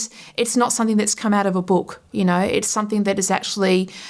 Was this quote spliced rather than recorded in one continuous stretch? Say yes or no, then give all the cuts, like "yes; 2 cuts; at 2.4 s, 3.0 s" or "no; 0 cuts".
no; 0 cuts